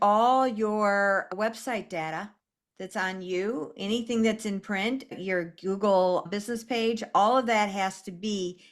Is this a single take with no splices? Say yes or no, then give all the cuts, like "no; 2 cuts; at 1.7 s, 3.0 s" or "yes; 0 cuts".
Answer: no; 3 cuts; at 1.3 s, 5.1 s, 6.3 s